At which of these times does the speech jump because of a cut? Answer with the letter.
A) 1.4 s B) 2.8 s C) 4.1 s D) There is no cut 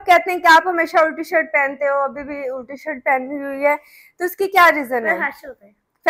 D